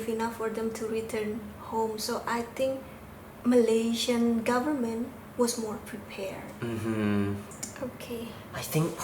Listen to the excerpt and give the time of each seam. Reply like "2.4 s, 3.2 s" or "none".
7.4 s